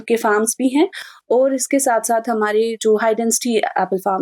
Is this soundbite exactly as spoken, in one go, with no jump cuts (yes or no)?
yes